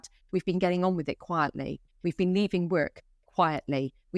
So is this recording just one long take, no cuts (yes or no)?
yes